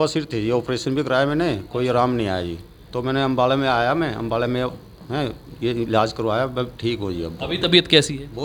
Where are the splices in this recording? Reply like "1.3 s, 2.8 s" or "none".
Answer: none